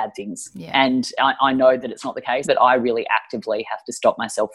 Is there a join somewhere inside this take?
yes; 1 cut; at 2.5 s

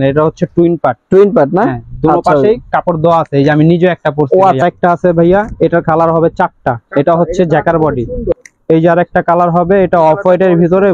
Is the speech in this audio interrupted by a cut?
yes; 2 cuts; at 4.6 s, 8.4 s

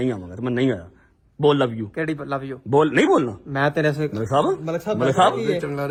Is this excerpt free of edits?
yes; 0 cuts

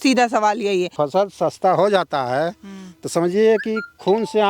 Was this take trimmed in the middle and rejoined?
yes; 1 cut; at 0.9 s

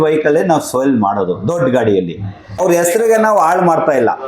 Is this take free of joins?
no; 1 cut; at 2.6 s

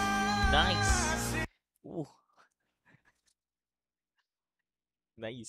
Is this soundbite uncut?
yes; 0 cuts

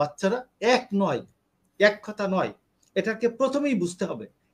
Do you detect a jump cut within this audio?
no; 0 cuts

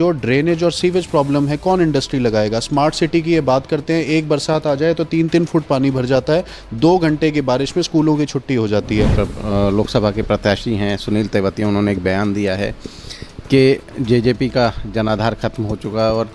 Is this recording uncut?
no; 1 cut; at 9.1 s

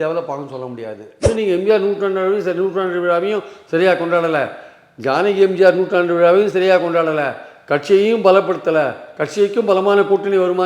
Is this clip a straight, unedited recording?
no; 1 cut; at 1.2 s

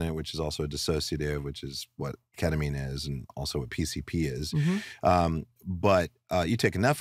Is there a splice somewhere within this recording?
no; 0 cuts

